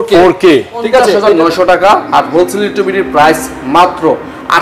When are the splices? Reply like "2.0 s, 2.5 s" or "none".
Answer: 1.2 s

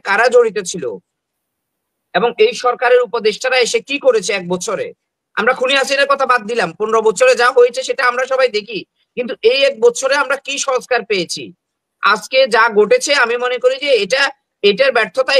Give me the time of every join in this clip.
none

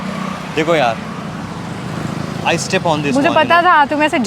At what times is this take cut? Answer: none

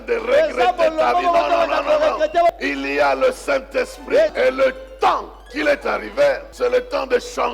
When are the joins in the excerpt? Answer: 2.5 s, 4.3 s, 5.5 s, 6.5 s

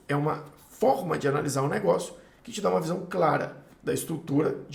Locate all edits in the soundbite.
none

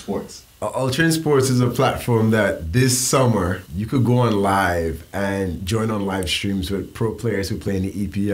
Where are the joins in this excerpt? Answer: 3.7 s

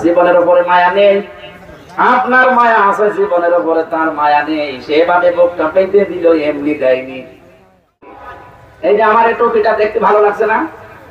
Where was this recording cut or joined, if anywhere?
8.2 s

